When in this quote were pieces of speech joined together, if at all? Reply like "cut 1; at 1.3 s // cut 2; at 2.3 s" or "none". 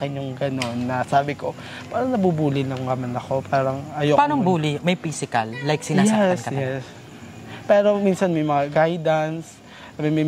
none